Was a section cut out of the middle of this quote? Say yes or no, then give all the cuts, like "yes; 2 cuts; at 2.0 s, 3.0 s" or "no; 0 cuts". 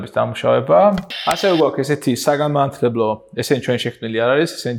yes; 1 cut; at 1.1 s